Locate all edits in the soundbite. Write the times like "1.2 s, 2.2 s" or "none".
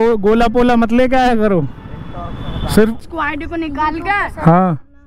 3.0 s